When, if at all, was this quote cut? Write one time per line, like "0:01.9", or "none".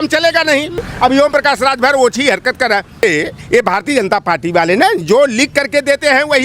0:00.9
0:03.0